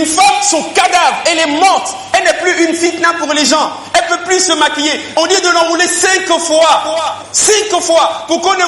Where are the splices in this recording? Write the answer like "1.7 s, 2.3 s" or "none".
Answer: 2.0 s, 5.0 s